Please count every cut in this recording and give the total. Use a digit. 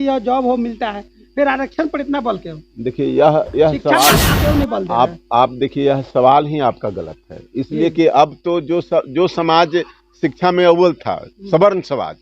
1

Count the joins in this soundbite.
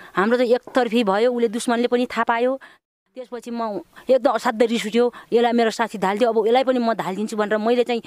1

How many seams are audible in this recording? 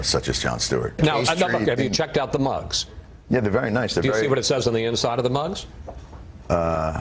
1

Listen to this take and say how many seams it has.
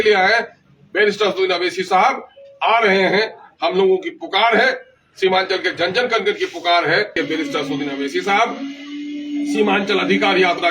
1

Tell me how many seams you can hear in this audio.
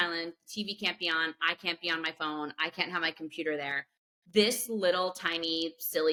0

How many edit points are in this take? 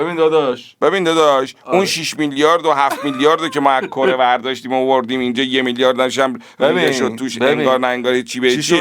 0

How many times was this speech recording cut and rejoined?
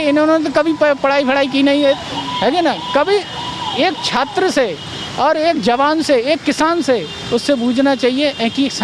0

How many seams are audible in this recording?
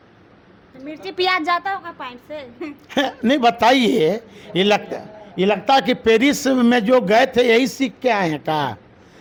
0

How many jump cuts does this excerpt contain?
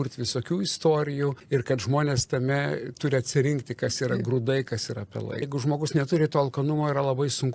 2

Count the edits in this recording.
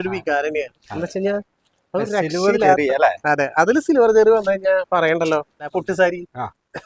1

